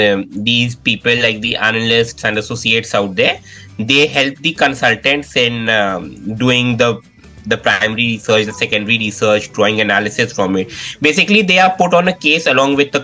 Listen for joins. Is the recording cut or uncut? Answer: uncut